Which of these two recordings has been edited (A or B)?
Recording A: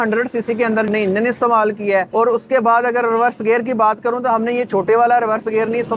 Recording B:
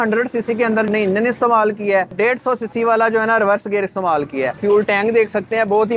B